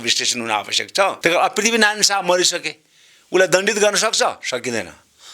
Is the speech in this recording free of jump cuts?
no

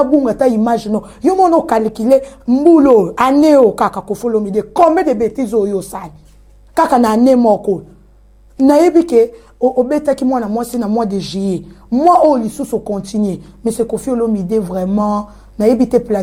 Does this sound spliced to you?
no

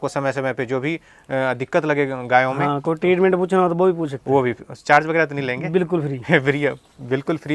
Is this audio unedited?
yes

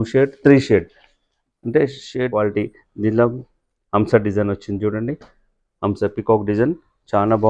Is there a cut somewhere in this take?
yes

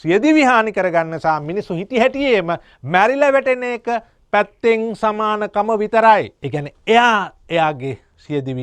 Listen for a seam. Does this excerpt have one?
yes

